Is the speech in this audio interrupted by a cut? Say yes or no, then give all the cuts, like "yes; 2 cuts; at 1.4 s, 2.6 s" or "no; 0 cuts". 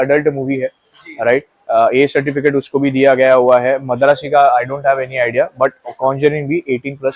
no; 0 cuts